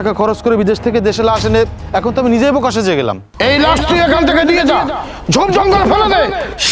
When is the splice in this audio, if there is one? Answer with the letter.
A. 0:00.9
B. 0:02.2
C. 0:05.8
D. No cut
D